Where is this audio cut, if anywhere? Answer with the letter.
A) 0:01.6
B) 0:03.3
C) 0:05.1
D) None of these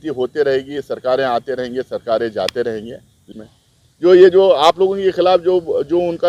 B